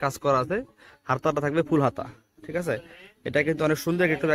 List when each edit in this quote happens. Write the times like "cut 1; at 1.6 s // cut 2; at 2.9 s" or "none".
none

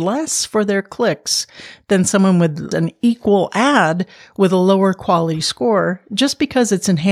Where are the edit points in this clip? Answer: cut 1; at 2.7 s

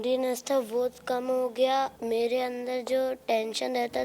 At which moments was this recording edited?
cut 1; at 1.9 s

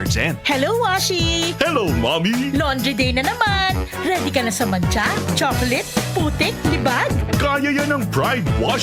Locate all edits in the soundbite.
none

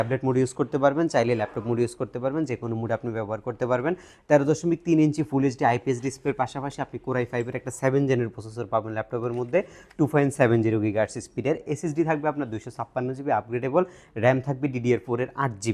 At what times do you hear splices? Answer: none

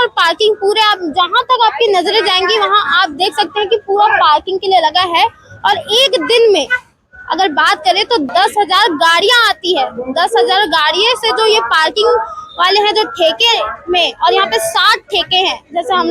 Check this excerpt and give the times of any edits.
cut 1; at 8.3 s

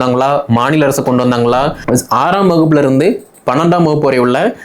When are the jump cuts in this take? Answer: cut 1; at 1.8 s

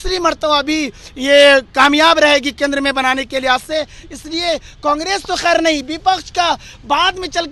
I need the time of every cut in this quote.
none

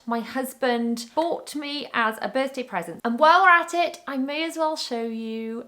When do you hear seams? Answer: cut 1; at 1.1 s

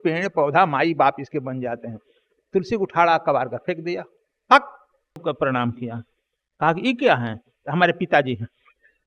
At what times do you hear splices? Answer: cut 1; at 5.2 s

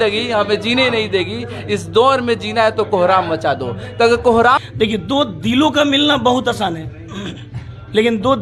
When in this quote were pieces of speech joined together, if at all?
cut 1; at 4.6 s

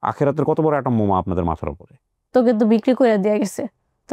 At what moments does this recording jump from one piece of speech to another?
cut 1; at 2.3 s

